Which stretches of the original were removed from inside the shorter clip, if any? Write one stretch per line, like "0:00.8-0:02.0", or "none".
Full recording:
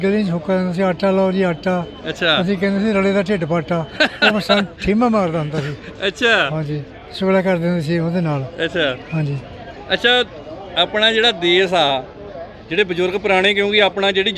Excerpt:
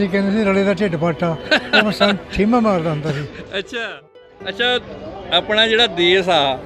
0:06.4-0:09.4